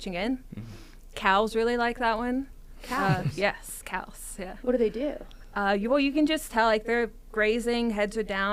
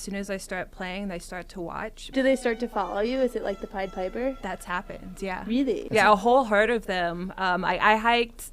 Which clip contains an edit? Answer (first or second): second